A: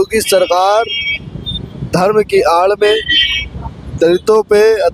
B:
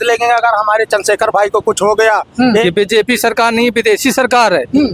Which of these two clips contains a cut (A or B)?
B